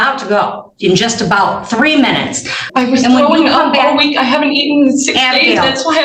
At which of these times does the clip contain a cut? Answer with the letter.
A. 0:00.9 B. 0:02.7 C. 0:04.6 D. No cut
B